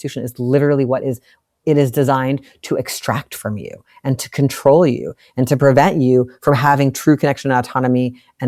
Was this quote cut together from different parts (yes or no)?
no